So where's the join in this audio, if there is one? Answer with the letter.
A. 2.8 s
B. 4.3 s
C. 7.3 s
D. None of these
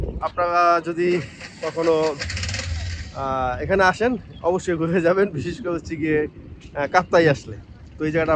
D